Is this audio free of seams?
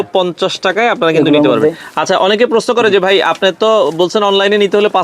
yes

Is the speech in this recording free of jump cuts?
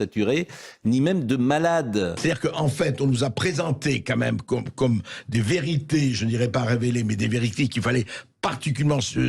no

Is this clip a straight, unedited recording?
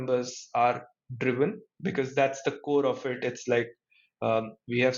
yes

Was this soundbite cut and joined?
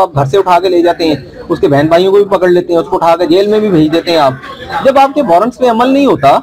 no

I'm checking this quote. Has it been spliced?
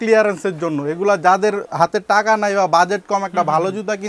no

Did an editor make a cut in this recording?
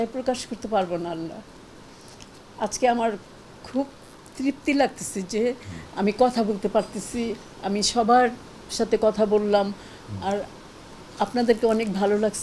no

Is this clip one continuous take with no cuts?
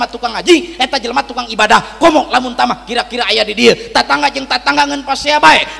yes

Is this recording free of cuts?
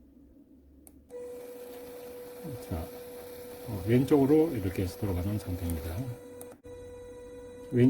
no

